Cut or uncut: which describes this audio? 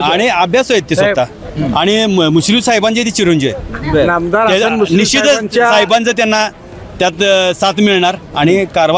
uncut